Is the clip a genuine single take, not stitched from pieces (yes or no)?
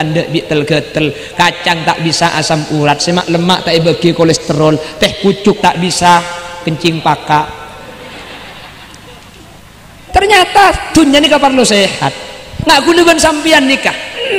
no